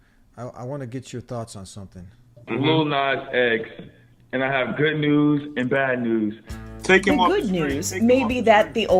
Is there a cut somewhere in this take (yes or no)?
no